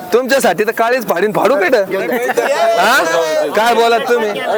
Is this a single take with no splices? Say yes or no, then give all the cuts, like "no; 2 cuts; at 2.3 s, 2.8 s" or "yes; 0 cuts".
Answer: yes; 0 cuts